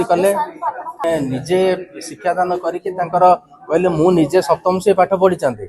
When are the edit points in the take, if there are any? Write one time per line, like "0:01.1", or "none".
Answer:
0:01.0

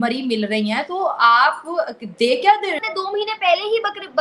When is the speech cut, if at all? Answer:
0:02.8

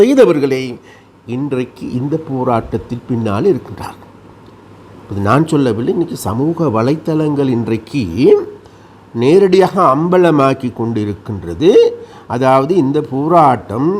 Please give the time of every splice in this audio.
none

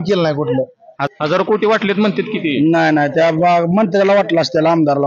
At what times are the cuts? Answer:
0:01.1

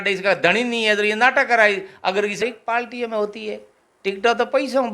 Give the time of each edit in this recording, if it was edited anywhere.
0:02.4

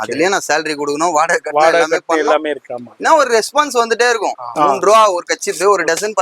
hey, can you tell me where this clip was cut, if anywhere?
0:04.5

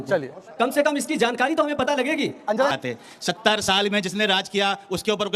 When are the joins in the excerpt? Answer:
0:02.7

